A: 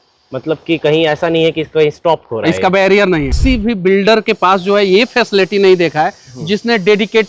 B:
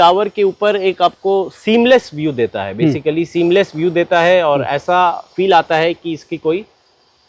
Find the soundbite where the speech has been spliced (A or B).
A